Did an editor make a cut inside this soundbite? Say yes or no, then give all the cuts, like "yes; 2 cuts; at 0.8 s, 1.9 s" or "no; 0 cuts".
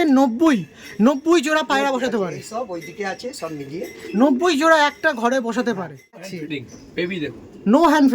yes; 1 cut; at 6.3 s